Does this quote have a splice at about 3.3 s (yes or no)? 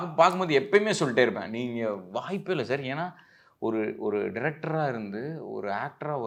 no